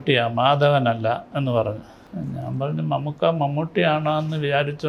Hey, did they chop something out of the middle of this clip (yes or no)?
yes